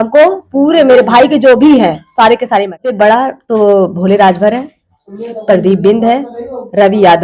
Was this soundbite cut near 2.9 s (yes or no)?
yes